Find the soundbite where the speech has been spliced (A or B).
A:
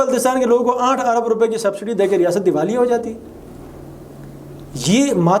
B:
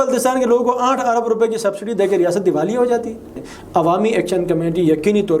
B